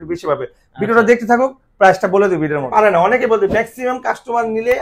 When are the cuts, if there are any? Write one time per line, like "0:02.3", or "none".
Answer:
0:02.7